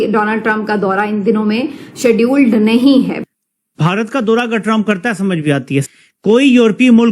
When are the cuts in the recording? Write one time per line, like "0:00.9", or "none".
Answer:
0:03.2
0:05.9